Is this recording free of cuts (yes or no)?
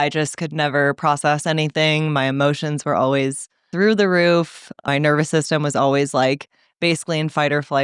no